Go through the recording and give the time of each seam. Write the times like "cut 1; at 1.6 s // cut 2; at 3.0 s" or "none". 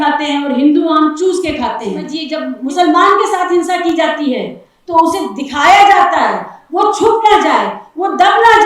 cut 1; at 2.2 s